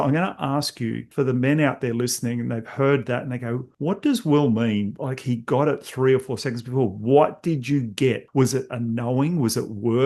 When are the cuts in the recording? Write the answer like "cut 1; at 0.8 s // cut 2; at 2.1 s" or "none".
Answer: cut 1; at 1.1 s // cut 2; at 3.7 s // cut 3; at 8.2 s